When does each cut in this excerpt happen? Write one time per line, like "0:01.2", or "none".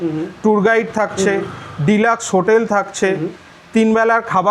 none